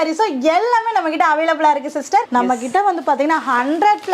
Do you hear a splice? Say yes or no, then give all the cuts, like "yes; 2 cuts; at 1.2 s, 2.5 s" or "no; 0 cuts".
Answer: yes; 1 cut; at 2.3 s